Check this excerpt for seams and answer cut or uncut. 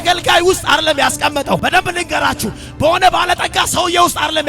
cut